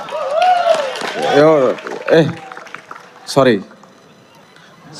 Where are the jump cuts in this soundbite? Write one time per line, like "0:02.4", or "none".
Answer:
none